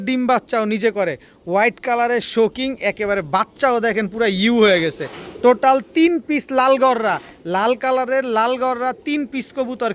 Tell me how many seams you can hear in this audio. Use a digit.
1